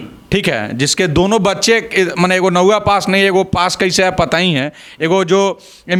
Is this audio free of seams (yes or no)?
yes